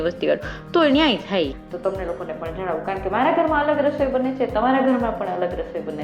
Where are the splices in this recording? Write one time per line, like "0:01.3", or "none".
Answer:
0:01.6